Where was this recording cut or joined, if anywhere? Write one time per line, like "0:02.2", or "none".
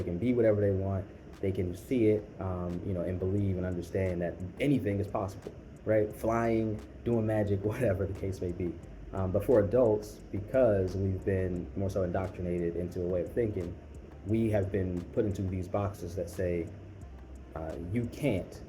none